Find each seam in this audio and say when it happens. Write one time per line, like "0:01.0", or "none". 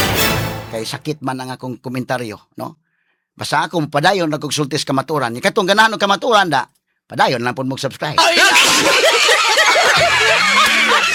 none